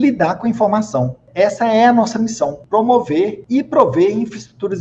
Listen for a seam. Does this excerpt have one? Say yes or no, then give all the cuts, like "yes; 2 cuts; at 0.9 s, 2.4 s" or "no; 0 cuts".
yes; 3 cuts; at 1.2 s, 2.6 s, 3.4 s